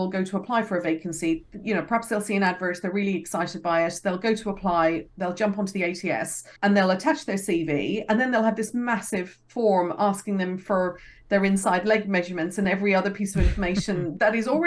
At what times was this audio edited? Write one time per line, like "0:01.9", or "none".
none